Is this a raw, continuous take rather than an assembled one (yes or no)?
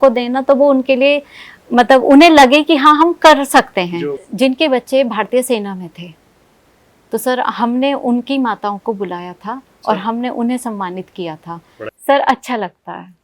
no